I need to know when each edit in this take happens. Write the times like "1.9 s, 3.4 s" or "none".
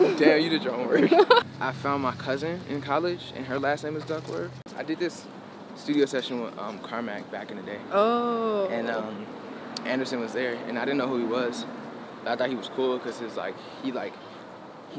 1.5 s, 4.7 s

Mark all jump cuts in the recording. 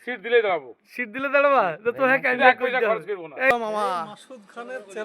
3.5 s

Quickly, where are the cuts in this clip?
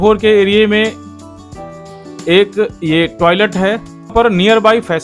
4.1 s

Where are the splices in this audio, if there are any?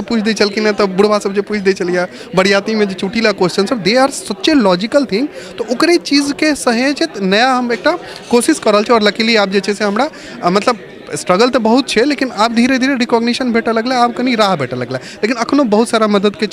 none

